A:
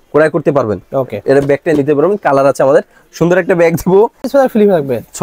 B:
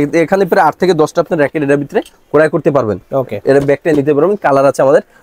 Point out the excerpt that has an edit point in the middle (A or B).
A